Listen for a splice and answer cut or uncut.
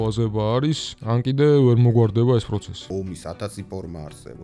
cut